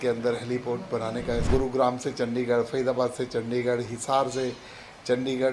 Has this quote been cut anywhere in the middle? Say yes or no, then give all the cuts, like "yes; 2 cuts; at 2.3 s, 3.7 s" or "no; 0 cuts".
yes; 1 cut; at 1.4 s